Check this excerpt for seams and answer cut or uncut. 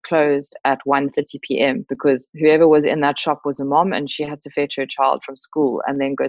cut